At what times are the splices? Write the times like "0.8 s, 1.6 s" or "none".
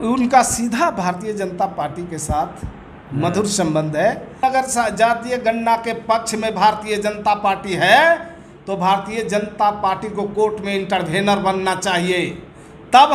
4.4 s